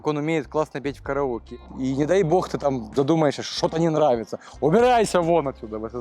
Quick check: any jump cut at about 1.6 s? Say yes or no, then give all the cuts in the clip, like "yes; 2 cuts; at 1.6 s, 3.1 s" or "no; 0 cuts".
yes; 1 cut; at 1.6 s